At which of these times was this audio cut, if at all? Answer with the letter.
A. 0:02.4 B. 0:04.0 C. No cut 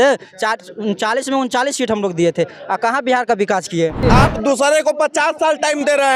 B